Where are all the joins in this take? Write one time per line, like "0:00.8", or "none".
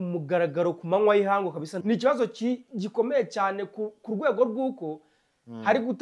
0:01.7